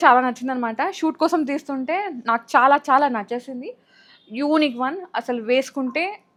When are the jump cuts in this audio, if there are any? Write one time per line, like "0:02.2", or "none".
none